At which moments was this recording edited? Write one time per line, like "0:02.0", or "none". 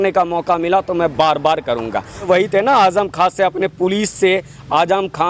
0:02.2